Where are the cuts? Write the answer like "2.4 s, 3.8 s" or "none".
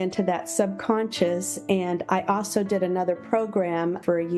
none